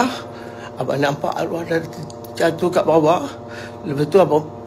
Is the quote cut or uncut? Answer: uncut